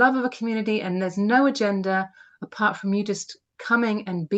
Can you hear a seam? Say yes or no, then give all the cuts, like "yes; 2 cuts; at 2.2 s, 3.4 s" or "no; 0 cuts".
no; 0 cuts